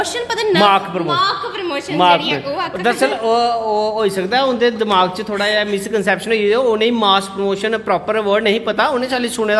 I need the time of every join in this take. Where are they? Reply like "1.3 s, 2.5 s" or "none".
none